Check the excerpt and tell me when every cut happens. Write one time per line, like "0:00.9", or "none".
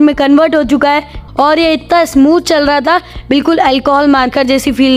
0:01.1

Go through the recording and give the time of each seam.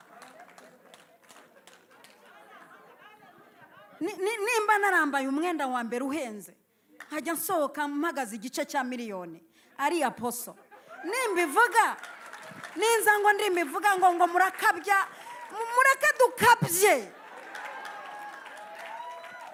none

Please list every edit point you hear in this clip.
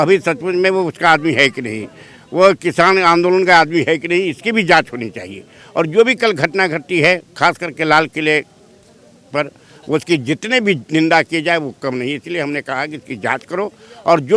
none

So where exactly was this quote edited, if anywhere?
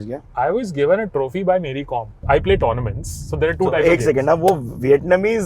0:02.2

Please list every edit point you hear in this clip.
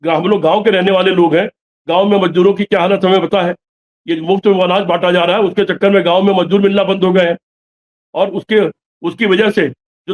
none

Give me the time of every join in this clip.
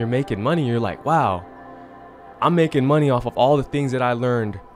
none

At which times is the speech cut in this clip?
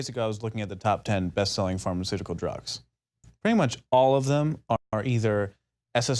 0:04.0

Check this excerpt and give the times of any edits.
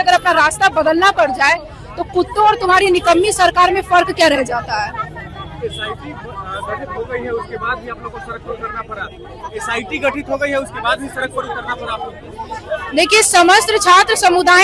none

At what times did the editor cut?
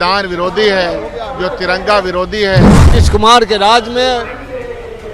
0:02.8

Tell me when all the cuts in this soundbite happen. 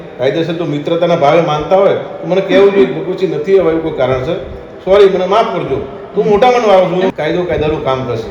0:07.1

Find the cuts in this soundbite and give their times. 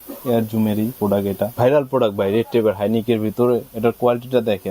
0:01.5

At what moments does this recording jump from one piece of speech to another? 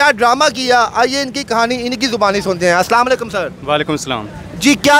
none

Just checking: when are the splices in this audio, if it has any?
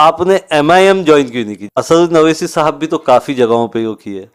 0:01.8

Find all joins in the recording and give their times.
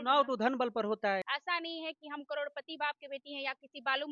0:01.3

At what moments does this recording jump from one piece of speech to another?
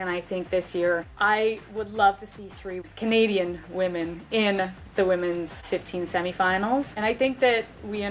0:01.1
0:02.8
0:05.6
0:06.9

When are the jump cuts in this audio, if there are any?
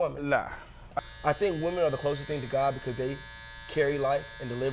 0:01.0

